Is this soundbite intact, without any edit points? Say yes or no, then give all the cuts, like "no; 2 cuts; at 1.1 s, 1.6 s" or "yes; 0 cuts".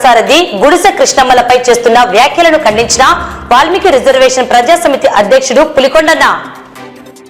yes; 0 cuts